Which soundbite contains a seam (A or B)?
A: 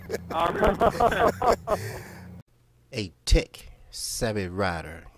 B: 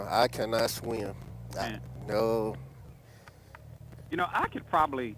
A